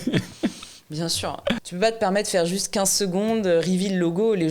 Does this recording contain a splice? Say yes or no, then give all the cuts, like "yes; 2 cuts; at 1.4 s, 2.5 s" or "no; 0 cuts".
yes; 1 cut; at 1.6 s